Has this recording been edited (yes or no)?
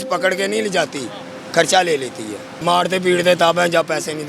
yes